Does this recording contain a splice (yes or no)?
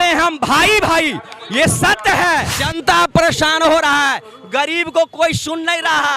yes